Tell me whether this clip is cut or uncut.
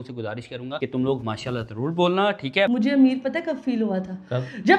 cut